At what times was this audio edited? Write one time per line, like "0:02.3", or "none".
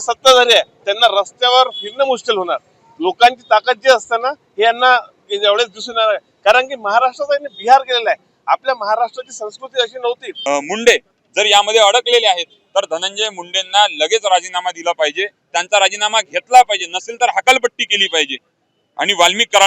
0:10.3